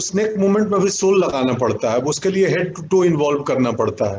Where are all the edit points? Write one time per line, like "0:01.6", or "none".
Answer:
none